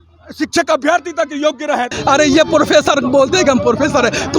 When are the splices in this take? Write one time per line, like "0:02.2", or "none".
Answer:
0:02.0